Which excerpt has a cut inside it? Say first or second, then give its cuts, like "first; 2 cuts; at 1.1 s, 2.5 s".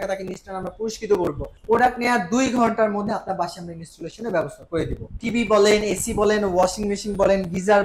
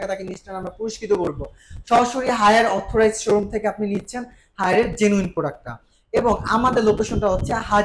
first; 2 cuts; at 1.5 s, 5.1 s